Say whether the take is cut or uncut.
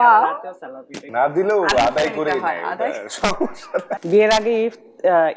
cut